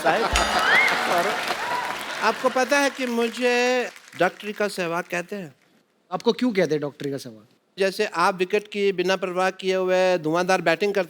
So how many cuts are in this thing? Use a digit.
1